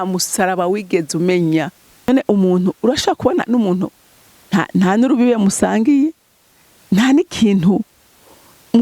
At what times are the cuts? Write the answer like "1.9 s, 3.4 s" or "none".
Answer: 2.1 s